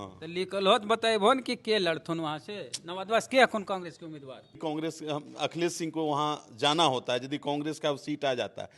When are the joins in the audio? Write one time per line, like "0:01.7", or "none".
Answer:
0:04.6